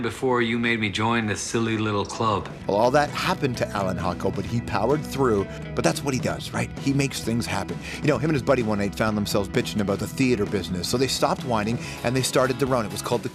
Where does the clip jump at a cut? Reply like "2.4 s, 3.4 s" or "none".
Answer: 9.3 s